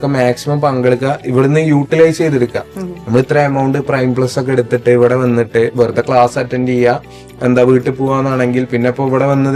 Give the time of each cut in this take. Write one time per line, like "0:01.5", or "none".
none